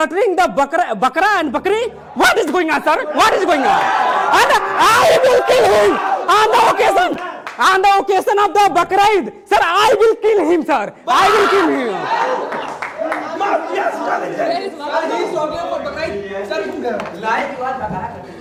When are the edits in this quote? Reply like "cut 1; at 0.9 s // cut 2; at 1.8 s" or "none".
none